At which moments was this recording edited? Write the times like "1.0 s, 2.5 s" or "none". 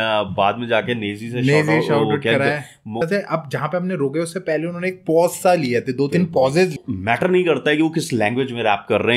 3.0 s, 6.8 s